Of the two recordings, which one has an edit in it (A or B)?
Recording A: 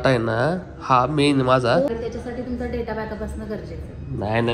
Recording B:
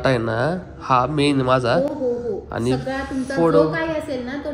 A